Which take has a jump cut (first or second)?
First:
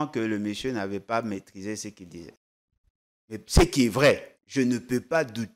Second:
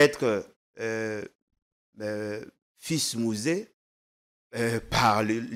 first